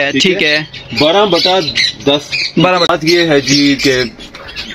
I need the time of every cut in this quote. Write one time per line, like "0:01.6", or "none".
0:02.9